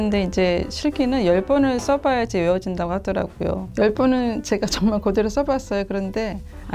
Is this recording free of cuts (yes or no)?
no